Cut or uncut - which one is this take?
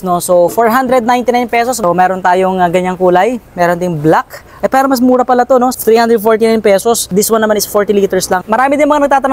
cut